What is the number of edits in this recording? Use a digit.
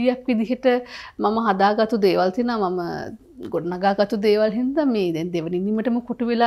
0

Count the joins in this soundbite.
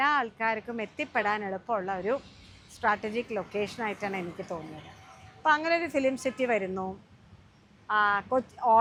0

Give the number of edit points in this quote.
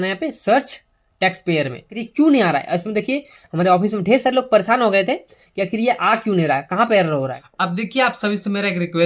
2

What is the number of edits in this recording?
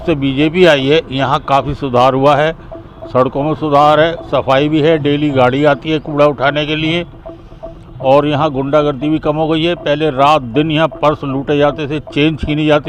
0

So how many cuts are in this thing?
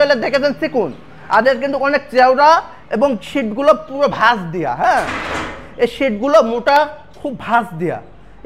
0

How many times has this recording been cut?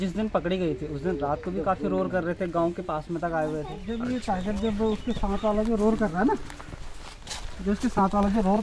1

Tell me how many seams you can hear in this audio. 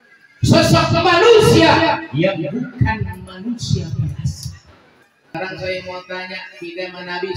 1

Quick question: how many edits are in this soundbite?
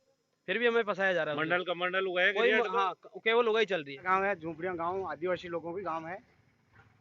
1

